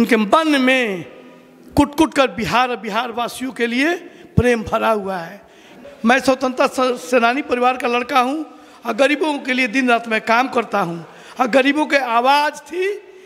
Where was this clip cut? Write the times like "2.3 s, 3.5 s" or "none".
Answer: 5.7 s